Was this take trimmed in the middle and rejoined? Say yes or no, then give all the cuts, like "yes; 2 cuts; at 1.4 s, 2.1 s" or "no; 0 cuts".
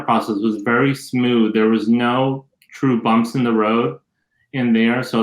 no; 0 cuts